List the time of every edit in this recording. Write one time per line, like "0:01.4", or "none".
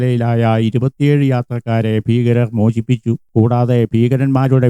0:03.2